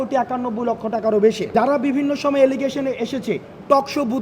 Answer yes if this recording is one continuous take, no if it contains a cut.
no